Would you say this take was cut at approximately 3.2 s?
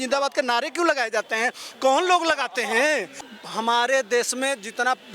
yes; 1 cut; at 3.2 s

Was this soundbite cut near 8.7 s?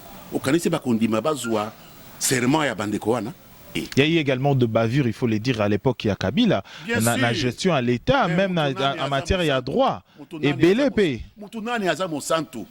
no; 1 cut; at 3.8 s

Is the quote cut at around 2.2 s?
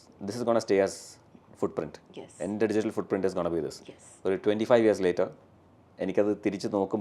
no; 0 cuts

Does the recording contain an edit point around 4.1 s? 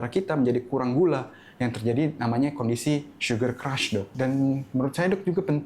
yes; 1 cut; at 4.1 s

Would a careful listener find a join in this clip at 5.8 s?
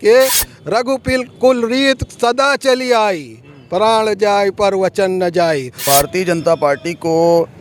yes; 1 cut; at 5.8 s

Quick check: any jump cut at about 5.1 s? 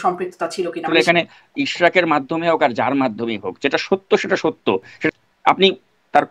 yes; 2 cuts; at 0.9 s, 5.1 s

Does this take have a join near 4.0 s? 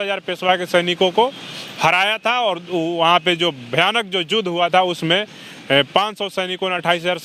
no; 0 cuts

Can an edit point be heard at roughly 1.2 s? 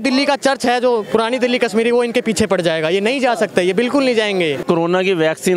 no; 1 cut; at 4.6 s

